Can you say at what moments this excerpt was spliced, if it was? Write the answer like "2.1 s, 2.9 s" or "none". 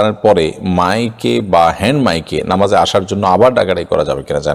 none

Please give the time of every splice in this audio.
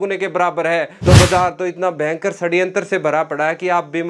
0.9 s

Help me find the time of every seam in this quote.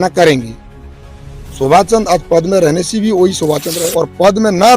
3.7 s

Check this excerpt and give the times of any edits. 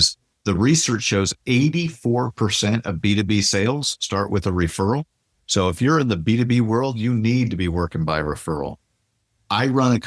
none

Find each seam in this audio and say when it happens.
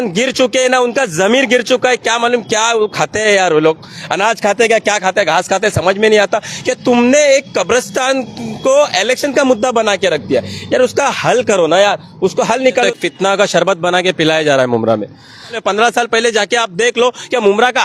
12.9 s, 15.6 s

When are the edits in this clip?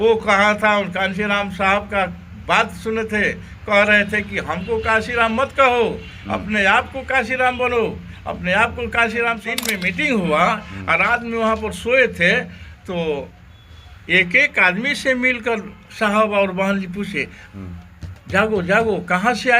9.5 s

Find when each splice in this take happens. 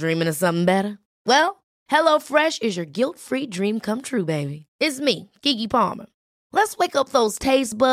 none

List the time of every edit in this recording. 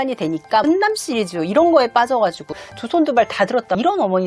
2.5 s

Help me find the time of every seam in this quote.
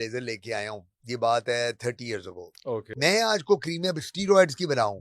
2.9 s

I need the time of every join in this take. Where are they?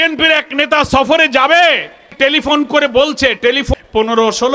2.1 s, 3.7 s

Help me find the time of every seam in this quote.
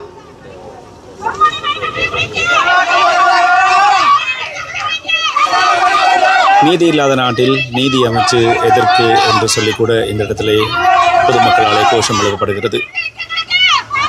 none

